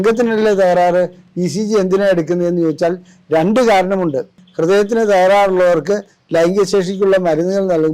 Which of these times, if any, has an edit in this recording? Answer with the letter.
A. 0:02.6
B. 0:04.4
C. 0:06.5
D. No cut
B